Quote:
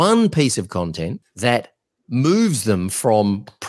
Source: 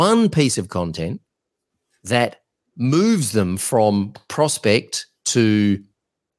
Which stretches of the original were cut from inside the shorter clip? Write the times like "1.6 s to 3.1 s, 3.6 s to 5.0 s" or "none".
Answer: 1.2 s to 1.9 s